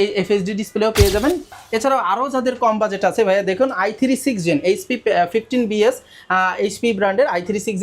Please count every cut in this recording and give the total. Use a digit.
1